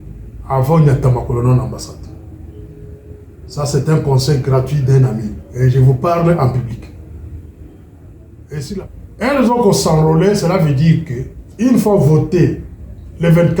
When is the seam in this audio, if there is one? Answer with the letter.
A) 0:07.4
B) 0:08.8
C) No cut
B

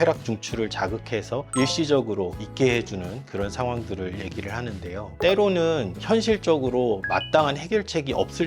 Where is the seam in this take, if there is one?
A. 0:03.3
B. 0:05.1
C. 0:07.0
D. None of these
B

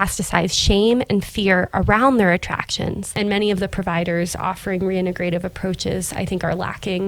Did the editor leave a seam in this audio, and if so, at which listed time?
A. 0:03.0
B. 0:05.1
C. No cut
A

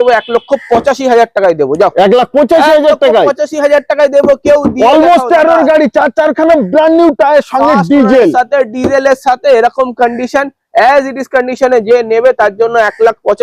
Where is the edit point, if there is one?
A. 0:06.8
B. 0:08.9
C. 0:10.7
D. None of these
D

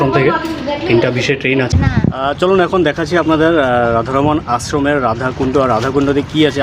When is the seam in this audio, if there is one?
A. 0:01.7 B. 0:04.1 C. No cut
A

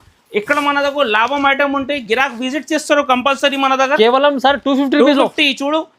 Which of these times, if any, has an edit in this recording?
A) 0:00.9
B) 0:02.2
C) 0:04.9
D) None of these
D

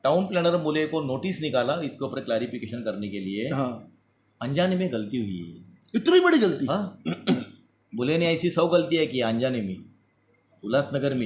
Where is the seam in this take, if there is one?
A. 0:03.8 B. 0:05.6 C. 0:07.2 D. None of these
D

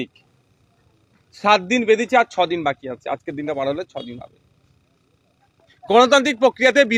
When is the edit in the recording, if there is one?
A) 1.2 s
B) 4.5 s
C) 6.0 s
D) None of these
D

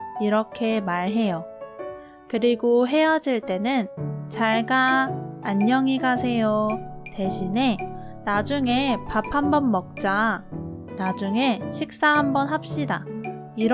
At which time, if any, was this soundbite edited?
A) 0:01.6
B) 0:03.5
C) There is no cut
C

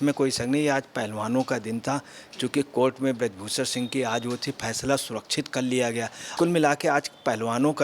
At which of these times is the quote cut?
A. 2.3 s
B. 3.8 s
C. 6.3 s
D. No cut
C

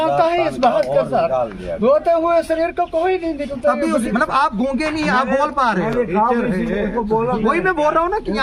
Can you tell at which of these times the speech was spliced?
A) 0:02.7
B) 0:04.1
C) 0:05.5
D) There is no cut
B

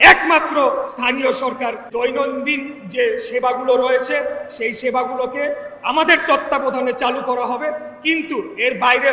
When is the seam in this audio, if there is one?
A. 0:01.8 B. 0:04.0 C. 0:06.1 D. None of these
A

